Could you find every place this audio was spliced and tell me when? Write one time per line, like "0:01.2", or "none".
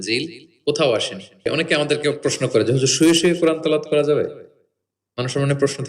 0:01.5

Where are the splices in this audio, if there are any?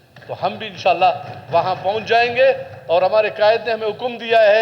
none

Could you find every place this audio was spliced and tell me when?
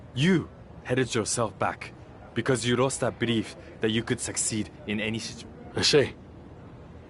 0:05.3
0:06.1

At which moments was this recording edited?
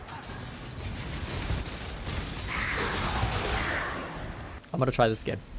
0:04.5

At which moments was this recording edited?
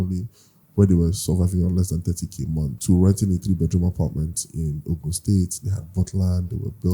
0:02.8

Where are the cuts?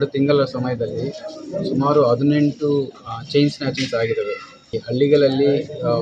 0:04.8

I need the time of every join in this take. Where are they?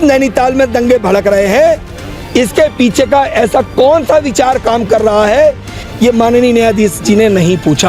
0:05.9

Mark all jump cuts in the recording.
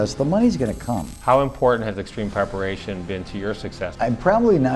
0:01.1
0:03.9

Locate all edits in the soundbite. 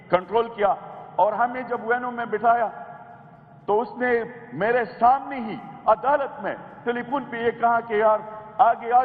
none

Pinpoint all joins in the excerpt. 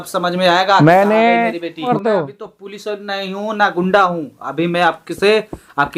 0:01.8

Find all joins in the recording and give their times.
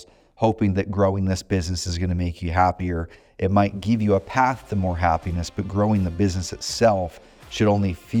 none

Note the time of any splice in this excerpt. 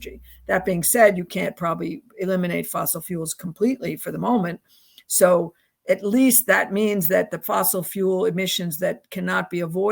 none

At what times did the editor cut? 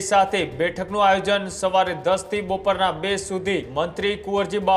0:03.7

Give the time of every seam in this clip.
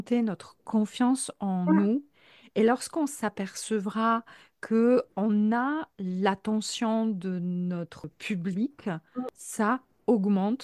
0:08.1
0:09.4

